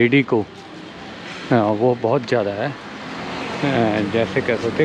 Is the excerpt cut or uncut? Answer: uncut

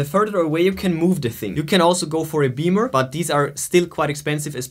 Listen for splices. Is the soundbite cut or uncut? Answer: cut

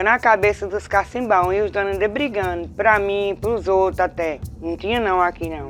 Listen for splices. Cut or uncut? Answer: cut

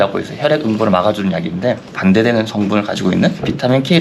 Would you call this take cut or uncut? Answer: uncut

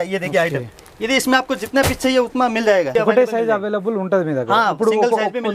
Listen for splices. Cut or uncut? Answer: cut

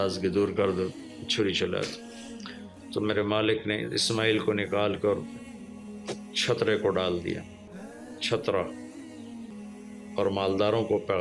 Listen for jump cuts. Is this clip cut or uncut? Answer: cut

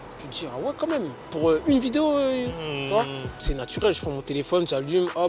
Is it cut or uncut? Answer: cut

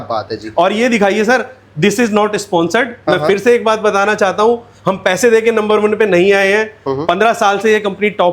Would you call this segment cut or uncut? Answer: uncut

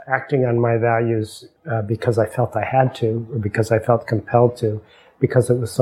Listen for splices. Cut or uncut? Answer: cut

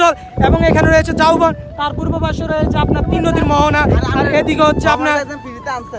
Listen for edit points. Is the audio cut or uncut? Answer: uncut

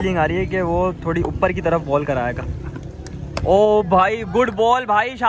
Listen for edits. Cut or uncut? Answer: uncut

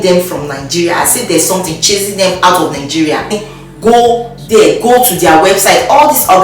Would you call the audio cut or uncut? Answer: cut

